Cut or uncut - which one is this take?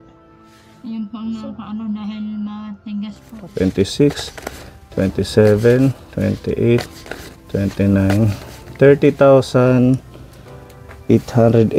cut